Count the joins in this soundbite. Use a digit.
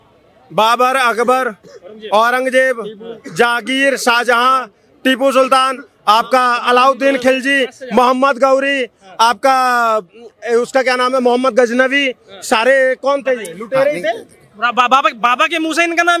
0